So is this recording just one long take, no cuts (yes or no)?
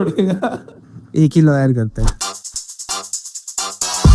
yes